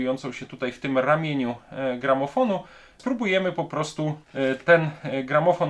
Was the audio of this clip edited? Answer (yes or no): yes